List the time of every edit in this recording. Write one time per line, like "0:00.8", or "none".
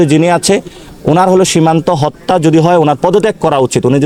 none